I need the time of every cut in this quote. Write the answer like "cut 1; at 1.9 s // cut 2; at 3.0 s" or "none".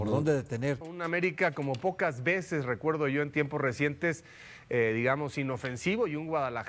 cut 1; at 0.9 s

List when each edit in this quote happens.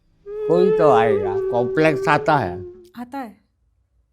cut 1; at 1.3 s

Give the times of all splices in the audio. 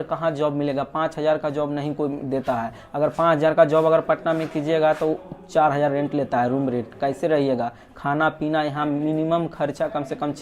none

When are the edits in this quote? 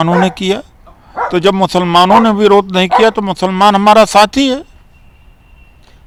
none

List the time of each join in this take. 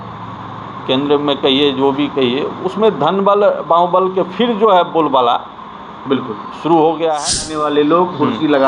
cut 1; at 7.4 s

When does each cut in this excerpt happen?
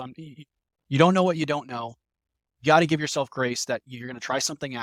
none

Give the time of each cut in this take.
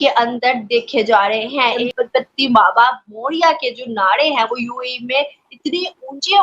cut 1; at 1.8 s

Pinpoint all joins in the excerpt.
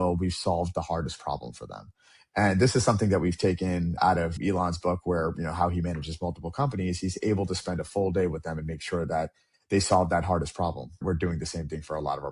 cut 1; at 4.0 s // cut 2; at 11.0 s

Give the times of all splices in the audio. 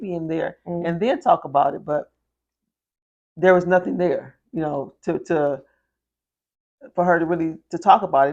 none

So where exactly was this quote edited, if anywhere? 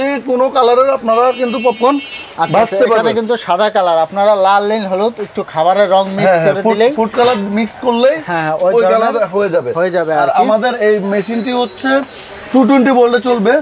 none

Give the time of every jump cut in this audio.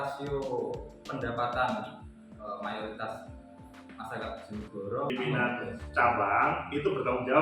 cut 1; at 5.1 s

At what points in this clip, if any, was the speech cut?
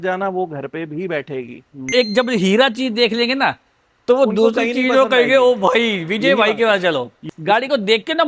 cut 1; at 1.9 s // cut 2; at 7.2 s

